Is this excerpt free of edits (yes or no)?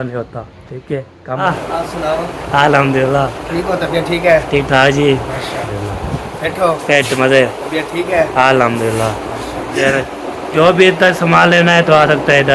no